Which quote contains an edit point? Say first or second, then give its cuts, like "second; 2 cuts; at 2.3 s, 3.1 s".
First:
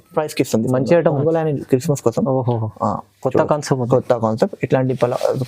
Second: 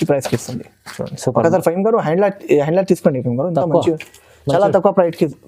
first; 1 cut; at 1.2 s